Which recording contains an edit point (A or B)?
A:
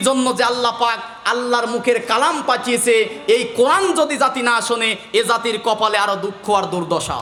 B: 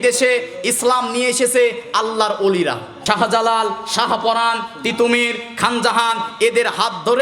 B